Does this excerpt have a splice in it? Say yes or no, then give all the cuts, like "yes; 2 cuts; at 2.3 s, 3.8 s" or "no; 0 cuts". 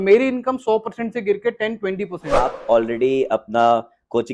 yes; 1 cut; at 2.3 s